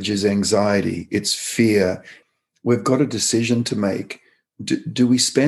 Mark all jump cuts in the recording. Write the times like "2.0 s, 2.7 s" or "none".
2.1 s